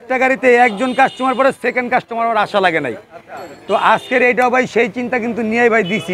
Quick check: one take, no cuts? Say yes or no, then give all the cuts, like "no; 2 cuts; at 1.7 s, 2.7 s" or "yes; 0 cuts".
yes; 0 cuts